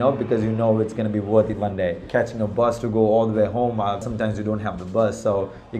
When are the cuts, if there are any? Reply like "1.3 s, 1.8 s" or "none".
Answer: 2.0 s, 4.1 s